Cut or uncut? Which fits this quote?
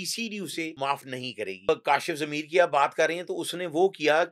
cut